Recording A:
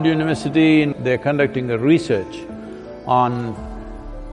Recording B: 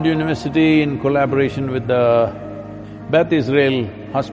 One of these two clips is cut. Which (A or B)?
A